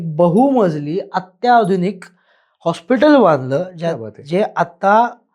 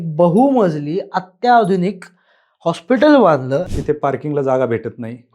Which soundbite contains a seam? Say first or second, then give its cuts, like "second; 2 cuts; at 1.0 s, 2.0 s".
second; 1 cut; at 3.7 s